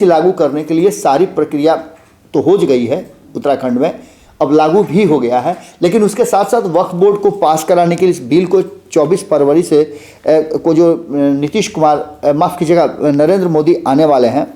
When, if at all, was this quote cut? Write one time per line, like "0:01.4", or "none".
none